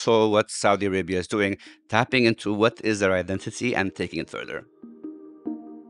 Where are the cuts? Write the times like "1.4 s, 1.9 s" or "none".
5.0 s